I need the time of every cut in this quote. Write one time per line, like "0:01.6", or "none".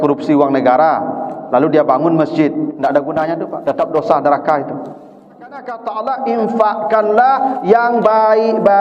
0:05.7

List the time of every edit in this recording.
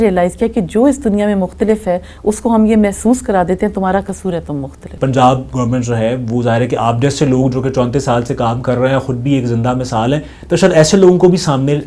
0:04.9

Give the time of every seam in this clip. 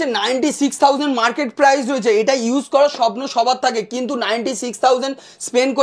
none

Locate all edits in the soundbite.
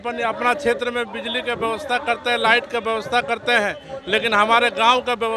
none

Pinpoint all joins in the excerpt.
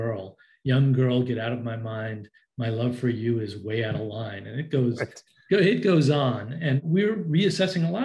0:06.8

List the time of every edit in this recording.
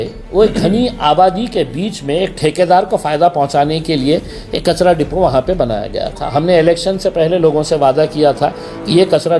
none

